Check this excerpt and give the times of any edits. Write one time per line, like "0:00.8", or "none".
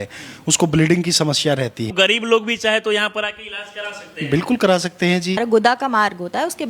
0:01.9
0:05.4

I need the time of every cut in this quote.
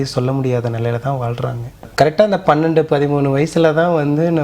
0:01.9

